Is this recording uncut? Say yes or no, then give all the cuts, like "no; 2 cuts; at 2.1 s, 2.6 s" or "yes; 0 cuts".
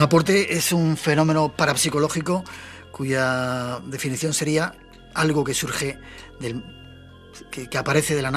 yes; 0 cuts